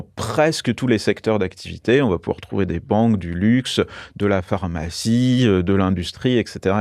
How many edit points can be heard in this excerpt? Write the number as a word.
zero